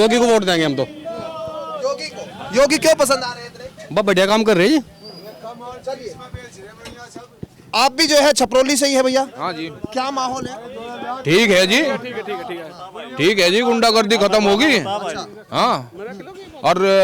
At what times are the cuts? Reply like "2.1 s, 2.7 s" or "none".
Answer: none